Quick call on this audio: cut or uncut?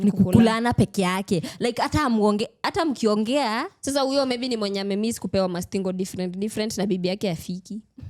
uncut